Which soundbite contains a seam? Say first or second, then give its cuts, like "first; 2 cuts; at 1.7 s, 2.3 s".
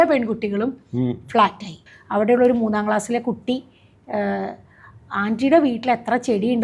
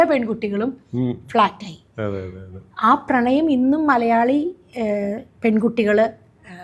first; 1 cut; at 1.8 s